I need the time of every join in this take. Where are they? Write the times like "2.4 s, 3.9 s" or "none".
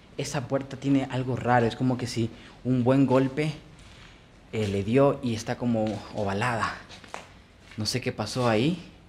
none